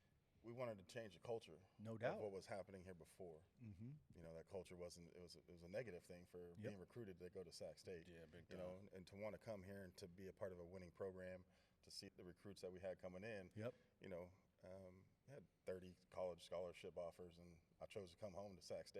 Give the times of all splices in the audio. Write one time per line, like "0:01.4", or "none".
0:04.0
0:12.1